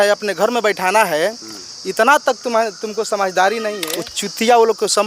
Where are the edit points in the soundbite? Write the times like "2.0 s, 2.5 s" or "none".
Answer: 3.8 s